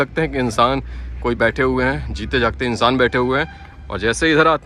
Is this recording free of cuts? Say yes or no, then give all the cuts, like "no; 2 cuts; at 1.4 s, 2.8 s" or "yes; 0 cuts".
yes; 0 cuts